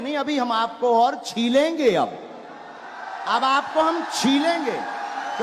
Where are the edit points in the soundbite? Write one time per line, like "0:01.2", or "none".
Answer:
none